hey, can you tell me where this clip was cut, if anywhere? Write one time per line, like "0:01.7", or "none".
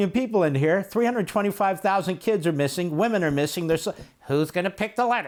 none